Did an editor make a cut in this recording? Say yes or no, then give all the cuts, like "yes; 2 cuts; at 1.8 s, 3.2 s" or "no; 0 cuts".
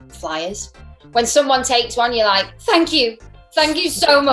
yes; 1 cut; at 2.5 s